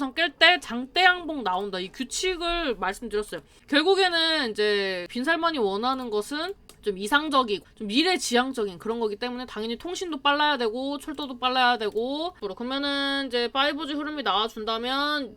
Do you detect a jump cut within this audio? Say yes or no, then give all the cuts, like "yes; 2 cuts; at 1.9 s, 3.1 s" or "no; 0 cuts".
yes; 5 cuts; at 3.5 s, 5.1 s, 6.6 s, 7.7 s, 12.4 s